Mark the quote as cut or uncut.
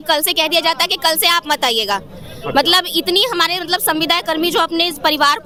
uncut